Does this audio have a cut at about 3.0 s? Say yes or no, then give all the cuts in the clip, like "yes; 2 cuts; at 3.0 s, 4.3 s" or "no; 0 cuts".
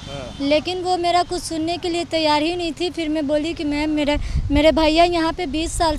no; 0 cuts